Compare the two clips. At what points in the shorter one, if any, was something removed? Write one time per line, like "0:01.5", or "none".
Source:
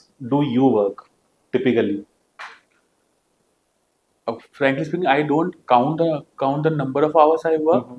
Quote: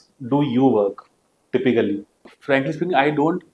0:02.3